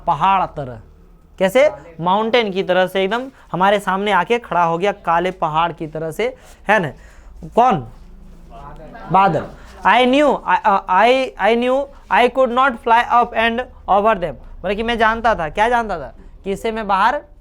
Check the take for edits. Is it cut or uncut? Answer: uncut